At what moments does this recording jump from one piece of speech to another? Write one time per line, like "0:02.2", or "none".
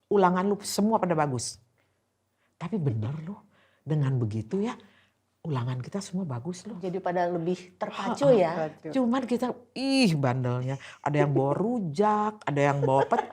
none